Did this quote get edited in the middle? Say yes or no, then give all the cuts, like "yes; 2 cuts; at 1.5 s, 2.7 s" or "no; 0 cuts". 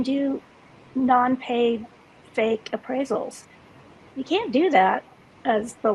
no; 0 cuts